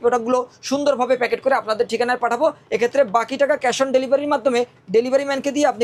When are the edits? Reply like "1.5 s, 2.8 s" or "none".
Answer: none